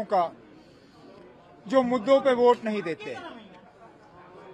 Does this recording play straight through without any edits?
yes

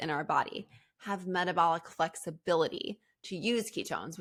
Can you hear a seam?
no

